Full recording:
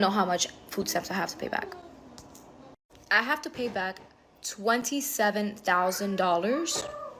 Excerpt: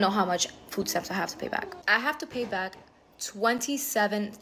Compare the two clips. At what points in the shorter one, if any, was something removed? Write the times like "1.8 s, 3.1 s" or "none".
1.8 s